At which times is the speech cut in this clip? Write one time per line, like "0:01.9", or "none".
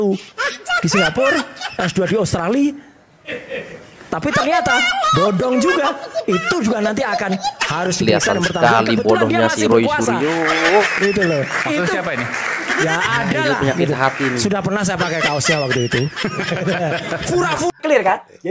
none